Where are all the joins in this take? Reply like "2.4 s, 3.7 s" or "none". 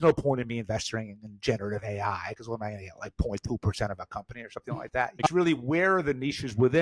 5.3 s